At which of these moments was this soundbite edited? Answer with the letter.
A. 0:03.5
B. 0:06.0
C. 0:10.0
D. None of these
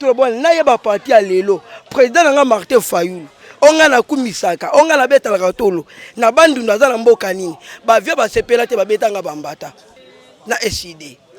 C